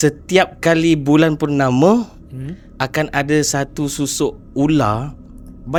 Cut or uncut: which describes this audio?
uncut